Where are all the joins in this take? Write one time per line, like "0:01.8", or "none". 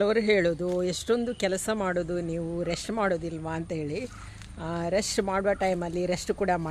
none